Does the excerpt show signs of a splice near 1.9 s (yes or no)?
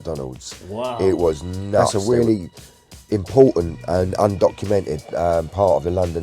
yes